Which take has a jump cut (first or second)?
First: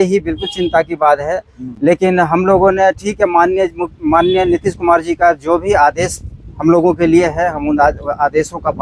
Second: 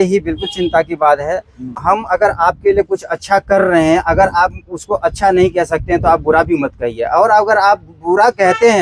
second